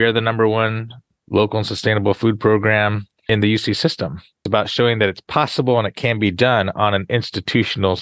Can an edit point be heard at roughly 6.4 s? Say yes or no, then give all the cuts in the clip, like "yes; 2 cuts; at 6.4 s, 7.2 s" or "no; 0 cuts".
no; 3 cuts; at 1.1 s, 3.3 s, 4.4 s